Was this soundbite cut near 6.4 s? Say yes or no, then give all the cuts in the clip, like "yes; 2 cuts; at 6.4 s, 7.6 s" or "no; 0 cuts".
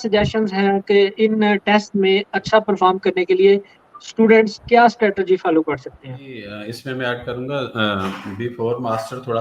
yes; 1 cut; at 6.4 s